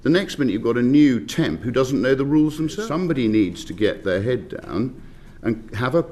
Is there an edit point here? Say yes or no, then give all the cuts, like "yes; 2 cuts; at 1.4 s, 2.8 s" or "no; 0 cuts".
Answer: yes; 1 cut; at 2.8 s